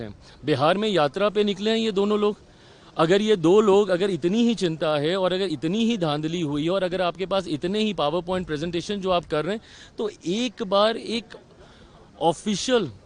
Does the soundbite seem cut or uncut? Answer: uncut